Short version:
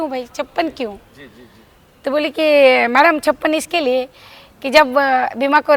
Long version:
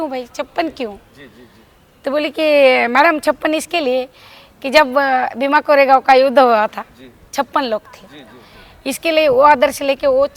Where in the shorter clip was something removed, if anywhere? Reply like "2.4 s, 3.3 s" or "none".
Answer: none